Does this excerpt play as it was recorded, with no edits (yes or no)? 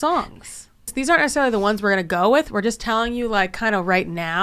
no